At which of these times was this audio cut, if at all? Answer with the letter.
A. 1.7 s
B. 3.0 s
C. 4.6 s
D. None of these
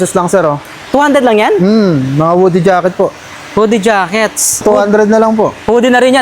C